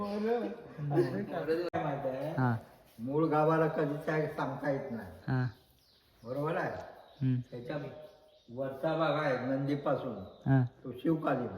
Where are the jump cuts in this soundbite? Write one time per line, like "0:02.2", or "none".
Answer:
0:01.7